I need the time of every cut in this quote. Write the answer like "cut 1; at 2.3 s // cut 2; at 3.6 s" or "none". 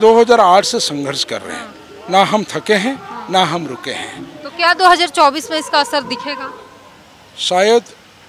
none